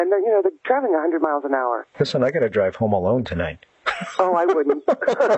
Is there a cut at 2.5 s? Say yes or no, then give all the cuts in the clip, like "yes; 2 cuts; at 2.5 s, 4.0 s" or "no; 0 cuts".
no; 0 cuts